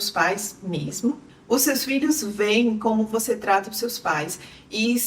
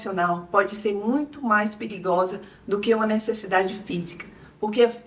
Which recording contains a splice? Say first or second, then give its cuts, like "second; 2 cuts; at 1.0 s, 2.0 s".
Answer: first; 1 cut; at 1.3 s